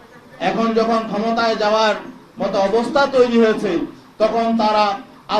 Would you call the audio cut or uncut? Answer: uncut